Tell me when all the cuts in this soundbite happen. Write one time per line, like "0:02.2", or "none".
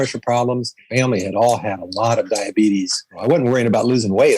0:00.8
0:03.2